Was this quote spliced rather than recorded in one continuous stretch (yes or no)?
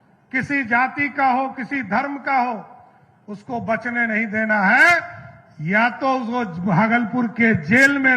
no